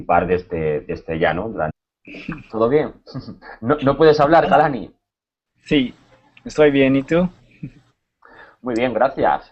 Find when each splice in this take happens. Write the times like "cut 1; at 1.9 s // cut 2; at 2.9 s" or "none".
none